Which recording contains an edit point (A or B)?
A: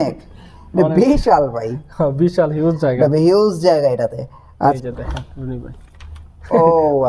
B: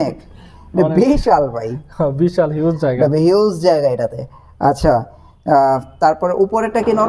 A